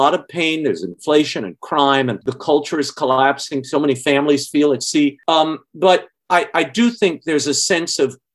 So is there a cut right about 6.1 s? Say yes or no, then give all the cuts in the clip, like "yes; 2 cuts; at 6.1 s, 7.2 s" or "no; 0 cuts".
no; 1 cut; at 2.3 s